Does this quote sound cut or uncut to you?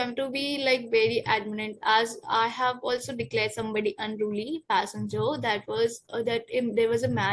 uncut